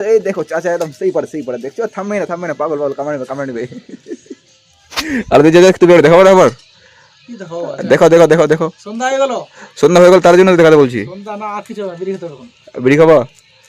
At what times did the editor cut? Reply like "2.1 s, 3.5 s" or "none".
none